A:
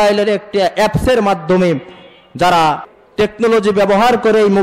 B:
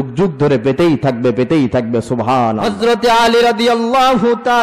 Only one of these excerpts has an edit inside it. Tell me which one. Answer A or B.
B